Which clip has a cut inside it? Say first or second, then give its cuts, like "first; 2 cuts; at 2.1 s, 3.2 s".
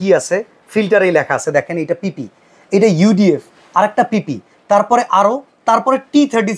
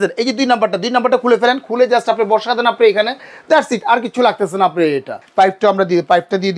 second; 1 cut; at 5.2 s